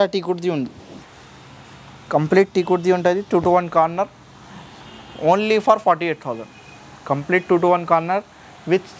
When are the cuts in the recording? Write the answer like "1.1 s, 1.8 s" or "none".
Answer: none

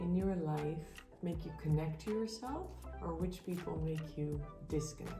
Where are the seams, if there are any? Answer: 1.0 s

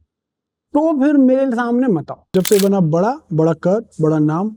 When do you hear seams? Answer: 2.3 s

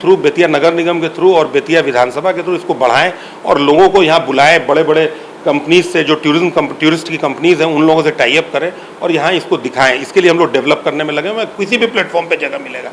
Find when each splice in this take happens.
none

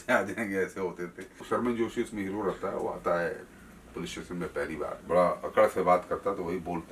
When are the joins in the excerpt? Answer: 1.5 s, 5.0 s

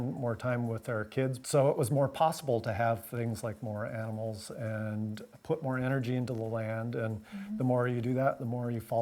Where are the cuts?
1.4 s

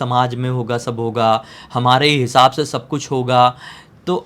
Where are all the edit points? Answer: none

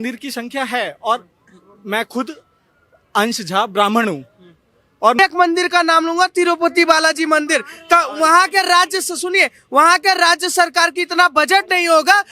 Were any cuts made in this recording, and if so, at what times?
5.2 s

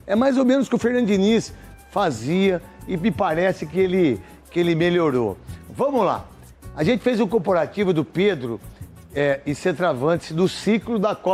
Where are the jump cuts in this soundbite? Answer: none

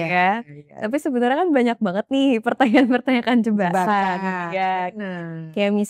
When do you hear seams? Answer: none

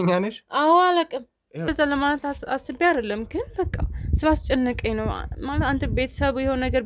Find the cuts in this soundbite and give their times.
1.7 s

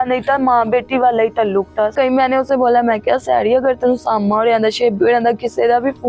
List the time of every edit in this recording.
1.9 s

